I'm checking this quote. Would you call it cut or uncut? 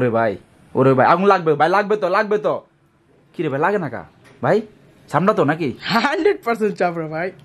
uncut